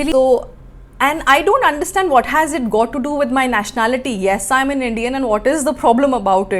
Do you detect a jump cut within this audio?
no; 0 cuts

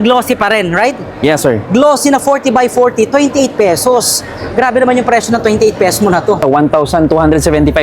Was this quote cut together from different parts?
yes; 1 cut; at 6.4 s

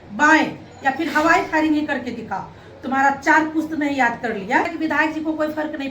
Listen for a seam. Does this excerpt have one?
yes; 1 cut; at 4.7 s

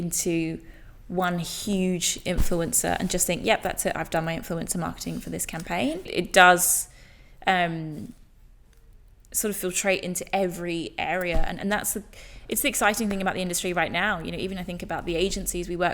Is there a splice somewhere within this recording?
yes; 1 cut; at 6.1 s

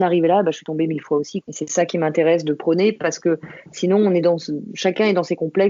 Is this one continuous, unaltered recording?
yes; 0 cuts

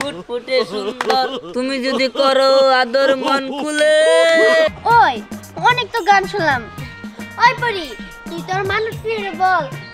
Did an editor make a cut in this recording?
yes; 1 cut; at 4.7 s

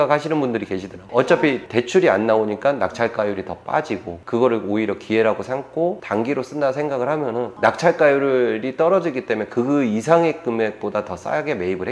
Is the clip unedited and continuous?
no; 2 cuts; at 6.0 s, 7.5 s

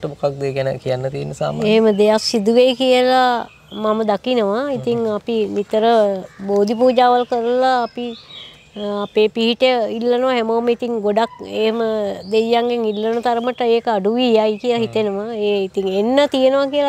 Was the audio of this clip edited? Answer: no; 0 cuts

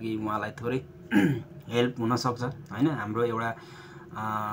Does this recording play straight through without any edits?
yes; 0 cuts

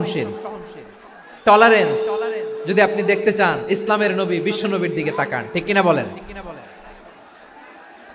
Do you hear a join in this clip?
no; 0 cuts

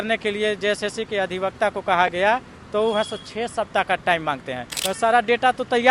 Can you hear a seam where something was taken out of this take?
yes; 1 cut; at 4.7 s

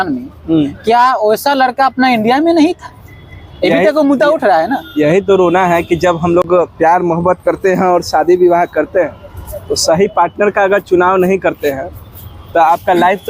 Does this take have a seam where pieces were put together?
no; 0 cuts

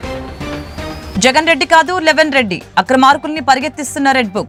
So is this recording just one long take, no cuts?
yes; 0 cuts

